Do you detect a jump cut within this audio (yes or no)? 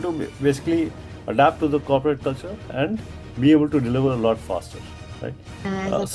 no